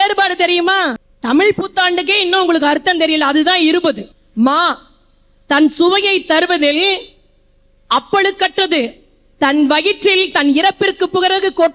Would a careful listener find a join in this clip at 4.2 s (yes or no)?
yes